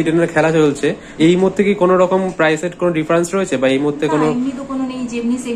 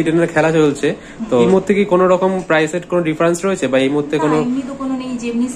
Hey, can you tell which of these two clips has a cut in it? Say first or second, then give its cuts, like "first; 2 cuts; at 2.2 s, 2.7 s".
first; 1 cut; at 1.3 s